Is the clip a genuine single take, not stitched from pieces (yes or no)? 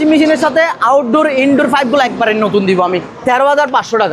no